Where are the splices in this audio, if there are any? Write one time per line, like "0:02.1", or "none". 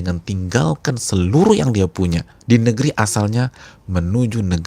0:02.3